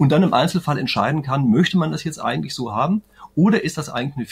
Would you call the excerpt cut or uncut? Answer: uncut